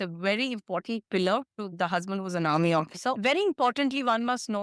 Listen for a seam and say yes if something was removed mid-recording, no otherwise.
yes